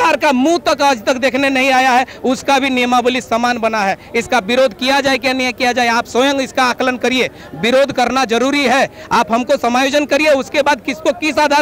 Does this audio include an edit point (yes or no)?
no